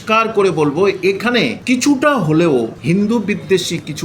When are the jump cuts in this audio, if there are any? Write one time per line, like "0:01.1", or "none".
0:01.6
0:02.8